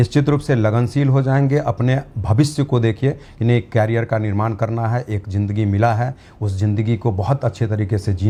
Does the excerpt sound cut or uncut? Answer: uncut